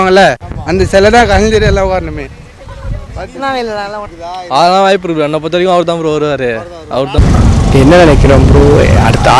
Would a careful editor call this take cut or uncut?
cut